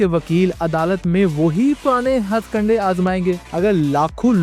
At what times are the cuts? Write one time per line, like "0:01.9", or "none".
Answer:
0:03.4